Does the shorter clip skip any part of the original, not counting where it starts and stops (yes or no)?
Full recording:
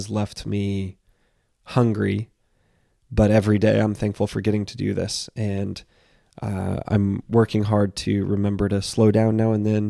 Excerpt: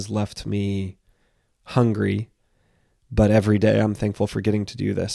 no